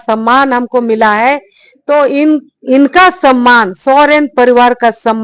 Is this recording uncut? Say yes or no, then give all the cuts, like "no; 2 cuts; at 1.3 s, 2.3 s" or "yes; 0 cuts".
yes; 0 cuts